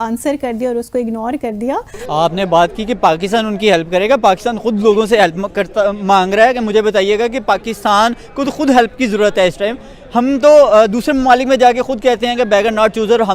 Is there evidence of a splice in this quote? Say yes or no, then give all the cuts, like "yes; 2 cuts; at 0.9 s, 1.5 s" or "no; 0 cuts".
yes; 1 cut; at 2.0 s